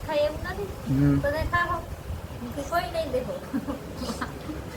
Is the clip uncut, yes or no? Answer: yes